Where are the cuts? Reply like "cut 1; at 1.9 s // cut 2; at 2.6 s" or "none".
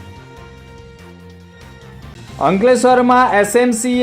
none